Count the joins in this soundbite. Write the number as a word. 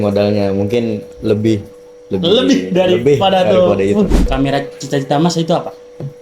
one